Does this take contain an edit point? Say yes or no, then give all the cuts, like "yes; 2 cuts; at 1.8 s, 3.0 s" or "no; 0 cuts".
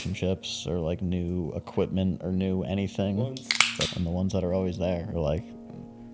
yes; 1 cut; at 3.9 s